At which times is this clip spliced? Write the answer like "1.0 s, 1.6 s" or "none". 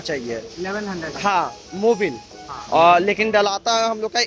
none